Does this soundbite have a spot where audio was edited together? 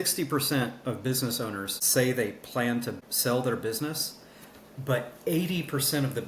yes; 2 cuts; at 1.7 s, 3.0 s

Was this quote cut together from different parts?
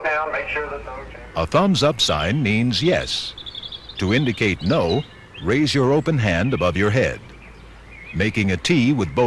yes; 1 cut; at 7.9 s

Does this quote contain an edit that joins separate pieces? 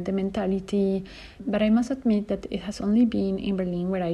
yes; 1 cut; at 1.4 s

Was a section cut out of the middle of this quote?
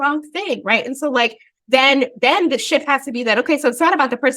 no; 0 cuts

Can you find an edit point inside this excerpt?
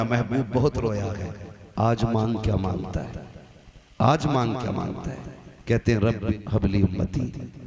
yes; 1 cut; at 6.3 s

